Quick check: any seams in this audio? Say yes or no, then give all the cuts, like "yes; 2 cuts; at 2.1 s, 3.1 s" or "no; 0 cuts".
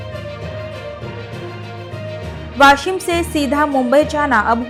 no; 0 cuts